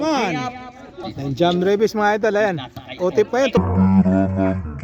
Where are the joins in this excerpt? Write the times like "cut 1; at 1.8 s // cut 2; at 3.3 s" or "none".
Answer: cut 1; at 1.1 s

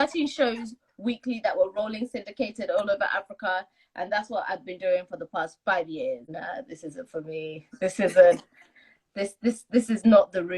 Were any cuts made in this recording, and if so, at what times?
cut 1; at 6.3 s

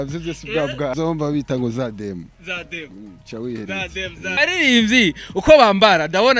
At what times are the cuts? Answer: cut 1; at 0.9 s // cut 2; at 4.4 s

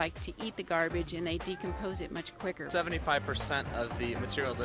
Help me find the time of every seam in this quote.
cut 1; at 2.6 s

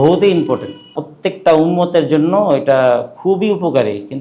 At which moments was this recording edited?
cut 1; at 1.0 s

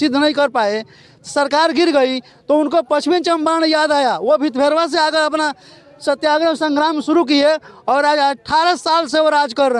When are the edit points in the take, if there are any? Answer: none

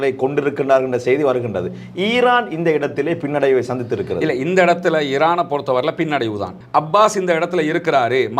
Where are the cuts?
cut 1; at 6.6 s

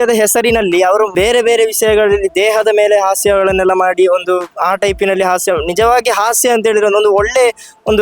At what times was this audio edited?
cut 1; at 1.1 s

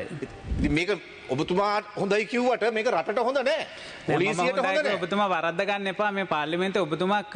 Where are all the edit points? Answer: none

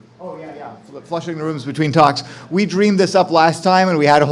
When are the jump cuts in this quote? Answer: cut 1; at 1.1 s

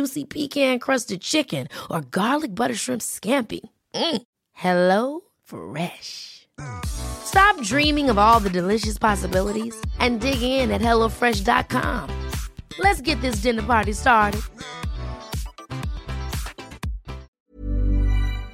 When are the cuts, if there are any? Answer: cut 1; at 17.3 s

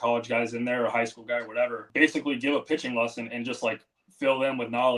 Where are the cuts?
cut 1; at 1.8 s

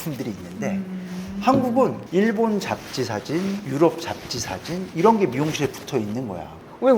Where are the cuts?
none

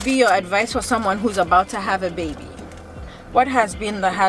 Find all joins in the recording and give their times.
cut 1; at 3.1 s

